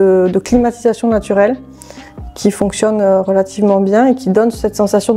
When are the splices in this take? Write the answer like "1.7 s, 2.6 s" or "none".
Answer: none